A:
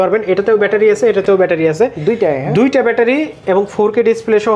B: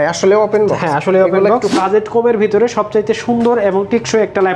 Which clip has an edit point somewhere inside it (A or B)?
B